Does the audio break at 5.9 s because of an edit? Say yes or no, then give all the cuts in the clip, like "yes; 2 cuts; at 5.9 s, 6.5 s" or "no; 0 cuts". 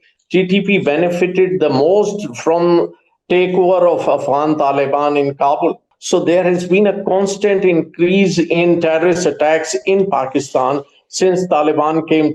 yes; 1 cut; at 5.9 s